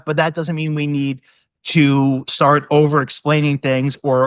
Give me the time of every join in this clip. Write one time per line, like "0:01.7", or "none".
0:02.3